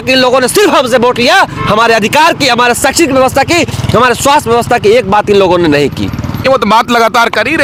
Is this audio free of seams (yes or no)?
yes